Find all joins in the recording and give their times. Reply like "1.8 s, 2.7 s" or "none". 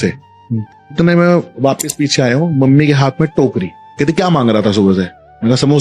0.9 s, 3.8 s